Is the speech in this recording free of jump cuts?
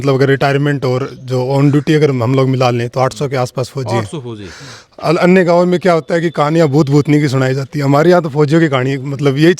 yes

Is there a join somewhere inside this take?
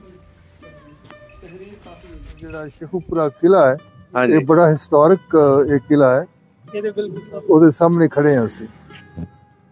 yes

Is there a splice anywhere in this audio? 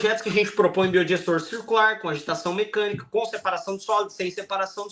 no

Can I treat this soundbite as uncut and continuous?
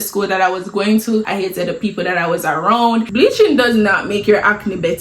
no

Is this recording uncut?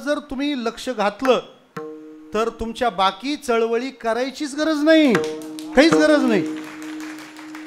yes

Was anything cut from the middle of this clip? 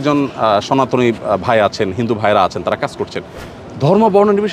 no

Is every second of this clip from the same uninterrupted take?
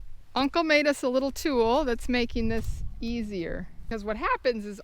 no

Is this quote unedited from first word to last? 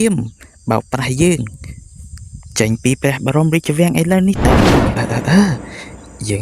no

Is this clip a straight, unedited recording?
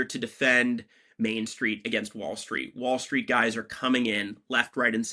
yes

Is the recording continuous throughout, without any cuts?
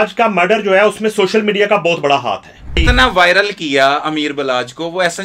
no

